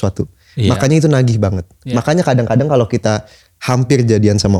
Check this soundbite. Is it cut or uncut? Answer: uncut